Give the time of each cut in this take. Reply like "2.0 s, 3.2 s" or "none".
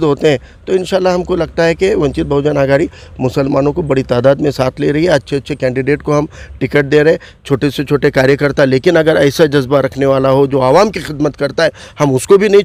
none

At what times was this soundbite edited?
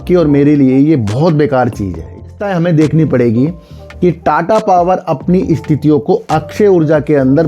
2.3 s

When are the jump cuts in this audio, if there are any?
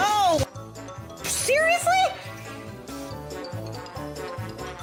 none

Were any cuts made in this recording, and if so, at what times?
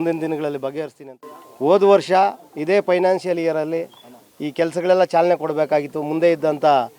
1.1 s

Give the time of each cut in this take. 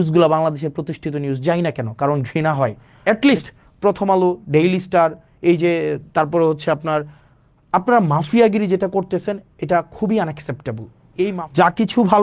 2.9 s, 11.0 s

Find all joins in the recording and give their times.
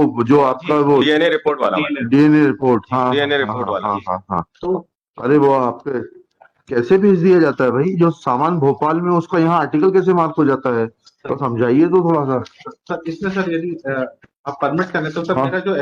none

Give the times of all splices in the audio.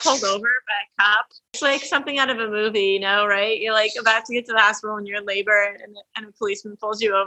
1.6 s

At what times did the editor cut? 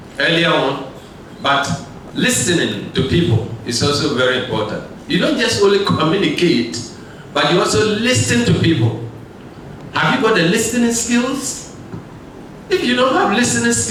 none

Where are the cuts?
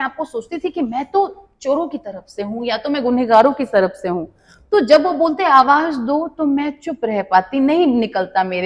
none

